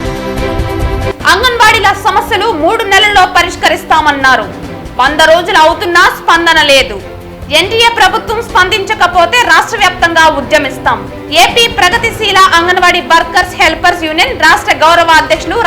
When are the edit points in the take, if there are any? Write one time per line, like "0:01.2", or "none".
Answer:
0:01.1